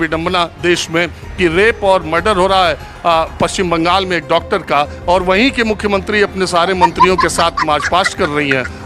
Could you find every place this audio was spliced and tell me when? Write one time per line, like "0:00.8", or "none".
none